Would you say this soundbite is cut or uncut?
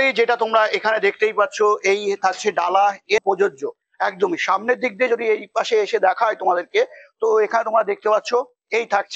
cut